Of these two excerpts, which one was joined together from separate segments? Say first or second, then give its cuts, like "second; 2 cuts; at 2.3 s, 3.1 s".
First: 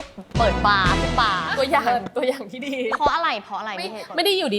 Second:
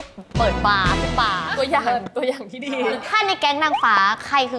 second; 1 cut; at 3.0 s